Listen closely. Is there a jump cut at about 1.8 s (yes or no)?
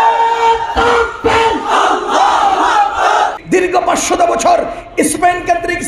no